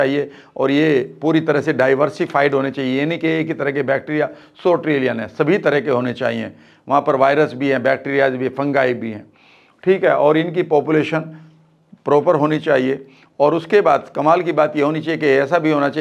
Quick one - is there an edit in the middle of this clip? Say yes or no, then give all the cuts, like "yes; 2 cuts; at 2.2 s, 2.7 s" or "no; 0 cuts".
no; 0 cuts